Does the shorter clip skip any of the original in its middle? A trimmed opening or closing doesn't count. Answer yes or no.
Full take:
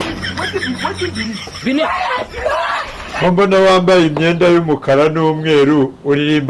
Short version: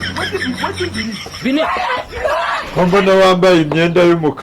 yes